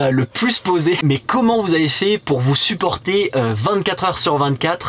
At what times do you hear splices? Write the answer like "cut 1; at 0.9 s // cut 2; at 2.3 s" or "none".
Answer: cut 1; at 1.0 s

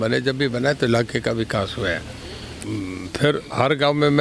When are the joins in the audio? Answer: cut 1; at 2.6 s

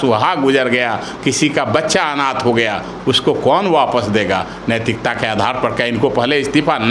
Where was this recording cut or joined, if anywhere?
none

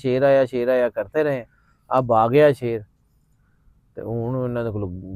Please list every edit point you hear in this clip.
none

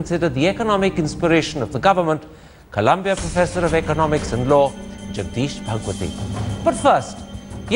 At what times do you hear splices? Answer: cut 1; at 6.4 s

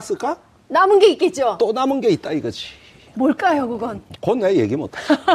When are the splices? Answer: none

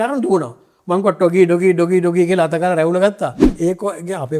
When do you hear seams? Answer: cut 1; at 3.4 s

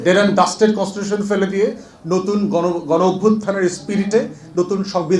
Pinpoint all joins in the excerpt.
none

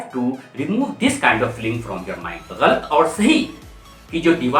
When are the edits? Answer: cut 1; at 2.4 s

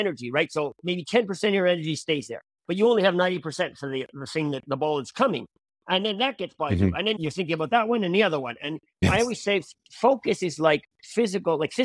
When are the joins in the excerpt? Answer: none

